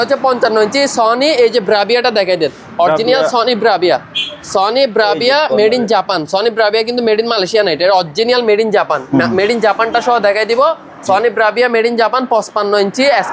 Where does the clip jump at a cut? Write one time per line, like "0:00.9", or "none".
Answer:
none